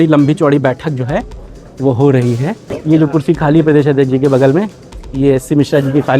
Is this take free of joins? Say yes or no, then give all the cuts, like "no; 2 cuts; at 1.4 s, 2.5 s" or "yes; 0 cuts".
no; 1 cut; at 2.7 s